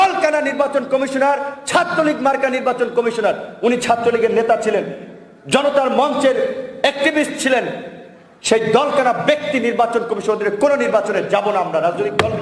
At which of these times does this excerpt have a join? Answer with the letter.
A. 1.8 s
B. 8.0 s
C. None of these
C